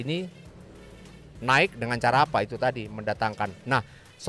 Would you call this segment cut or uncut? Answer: uncut